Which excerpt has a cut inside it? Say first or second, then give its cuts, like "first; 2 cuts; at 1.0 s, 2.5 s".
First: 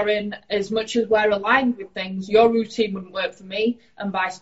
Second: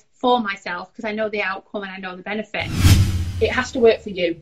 second; 1 cut; at 3.1 s